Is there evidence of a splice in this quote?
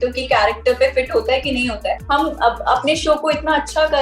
yes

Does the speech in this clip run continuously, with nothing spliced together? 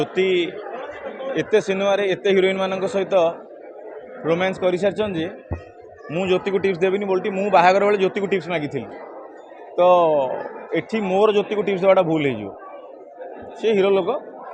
yes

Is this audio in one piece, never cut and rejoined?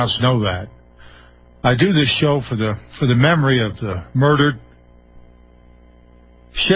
no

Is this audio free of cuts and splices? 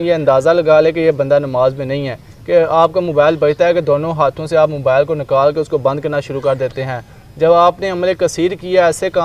yes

